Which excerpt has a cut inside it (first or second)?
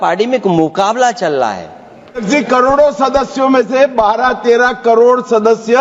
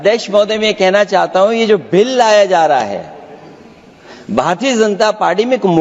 first